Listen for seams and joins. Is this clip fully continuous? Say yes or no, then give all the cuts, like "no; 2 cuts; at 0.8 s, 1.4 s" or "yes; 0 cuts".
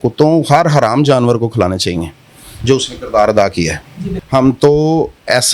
no; 1 cut; at 4.1 s